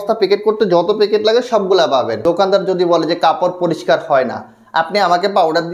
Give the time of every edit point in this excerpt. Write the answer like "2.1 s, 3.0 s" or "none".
2.2 s